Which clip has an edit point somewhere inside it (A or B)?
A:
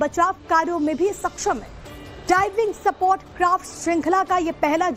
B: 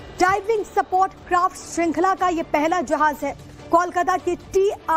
A